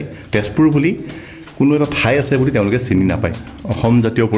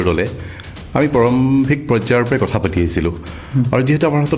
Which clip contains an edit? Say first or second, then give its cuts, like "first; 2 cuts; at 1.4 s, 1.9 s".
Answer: first; 1 cut; at 3.3 s